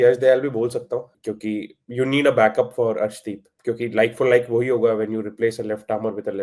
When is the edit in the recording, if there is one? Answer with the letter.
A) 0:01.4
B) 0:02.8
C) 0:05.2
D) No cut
D